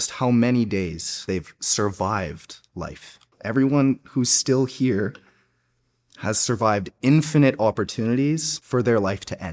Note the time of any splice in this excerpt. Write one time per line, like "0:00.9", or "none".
0:01.2
0:03.3
0:08.5